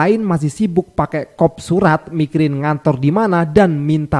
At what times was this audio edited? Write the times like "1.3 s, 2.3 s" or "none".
none